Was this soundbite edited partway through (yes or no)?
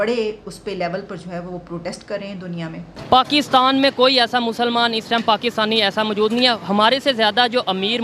yes